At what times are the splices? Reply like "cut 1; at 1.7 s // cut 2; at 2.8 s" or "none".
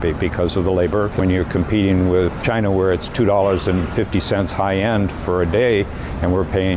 cut 1; at 1.1 s // cut 2; at 2.4 s